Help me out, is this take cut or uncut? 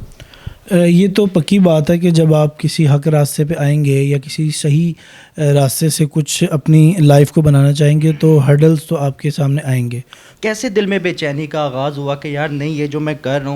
cut